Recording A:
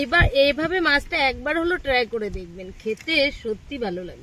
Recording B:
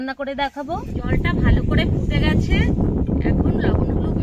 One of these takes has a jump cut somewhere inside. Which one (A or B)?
B